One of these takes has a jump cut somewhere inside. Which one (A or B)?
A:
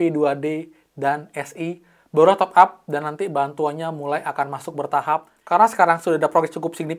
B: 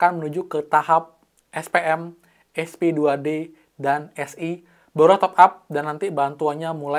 A